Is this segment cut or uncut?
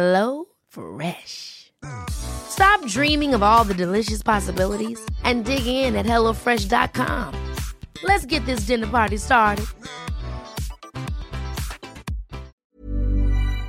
cut